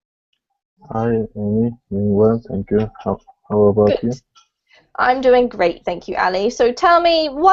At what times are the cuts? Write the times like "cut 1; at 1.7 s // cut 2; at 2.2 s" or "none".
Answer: none